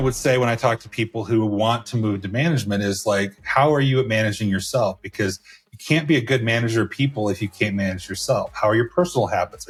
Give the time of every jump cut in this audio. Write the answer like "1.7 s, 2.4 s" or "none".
none